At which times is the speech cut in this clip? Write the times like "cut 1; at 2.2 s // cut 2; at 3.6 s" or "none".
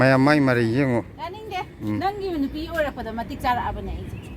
none